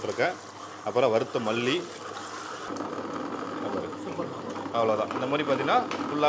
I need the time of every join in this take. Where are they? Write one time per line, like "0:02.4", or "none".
0:02.7